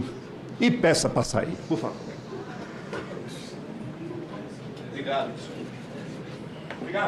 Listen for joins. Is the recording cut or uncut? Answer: uncut